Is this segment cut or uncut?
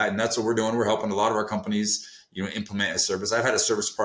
uncut